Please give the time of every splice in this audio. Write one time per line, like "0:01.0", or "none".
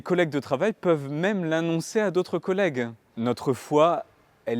0:03.0